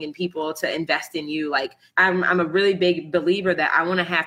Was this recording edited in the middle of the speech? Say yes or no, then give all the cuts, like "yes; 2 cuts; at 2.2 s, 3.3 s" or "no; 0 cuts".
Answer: yes; 1 cut; at 1.8 s